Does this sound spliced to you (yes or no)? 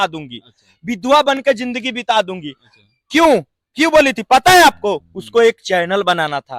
no